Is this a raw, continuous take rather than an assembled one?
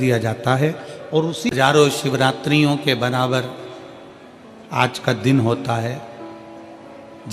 no; 1 cut; at 1.5 s

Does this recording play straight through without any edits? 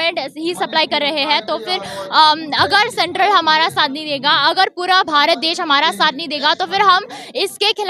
yes; 0 cuts

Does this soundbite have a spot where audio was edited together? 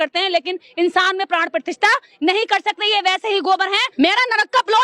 yes; 1 cut; at 3.9 s

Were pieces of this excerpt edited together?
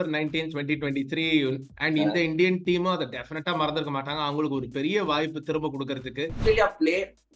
yes; 2 cuts; at 1.7 s, 6.4 s

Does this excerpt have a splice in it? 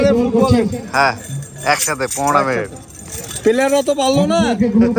no; 0 cuts

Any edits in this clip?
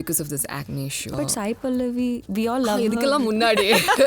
yes; 1 cut; at 1.1 s

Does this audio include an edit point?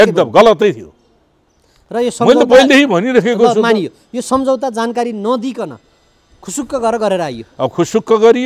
no; 0 cuts

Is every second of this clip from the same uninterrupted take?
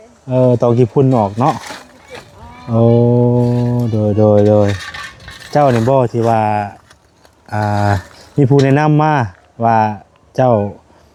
yes; 0 cuts

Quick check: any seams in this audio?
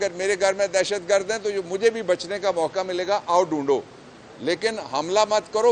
no; 0 cuts

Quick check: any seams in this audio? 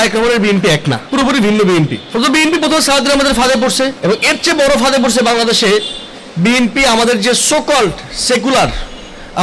yes; 3 cuts; at 1.0 s, 2.0 s, 4.0 s

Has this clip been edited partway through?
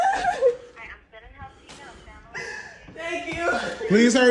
yes; 1 cut; at 2.0 s

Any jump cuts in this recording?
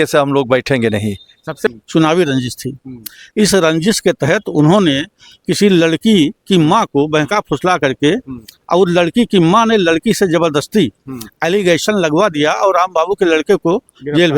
yes; 1 cut; at 1.7 s

